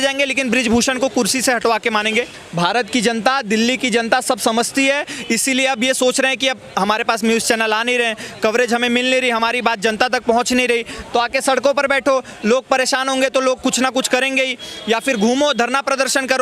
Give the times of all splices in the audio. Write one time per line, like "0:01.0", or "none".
0:02.4